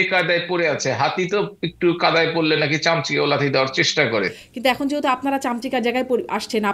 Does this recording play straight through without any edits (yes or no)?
no